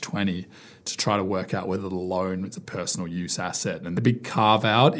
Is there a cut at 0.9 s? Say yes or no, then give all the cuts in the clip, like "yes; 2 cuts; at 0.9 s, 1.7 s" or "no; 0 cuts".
no; 1 cut; at 4.0 s